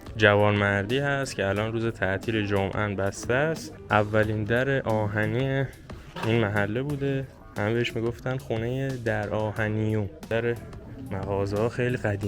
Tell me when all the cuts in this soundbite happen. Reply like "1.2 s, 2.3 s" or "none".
3.7 s, 7.4 s, 10.3 s